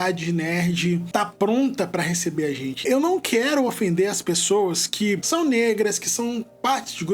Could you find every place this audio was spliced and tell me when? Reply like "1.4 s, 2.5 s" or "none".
1.0 s, 2.8 s, 5.2 s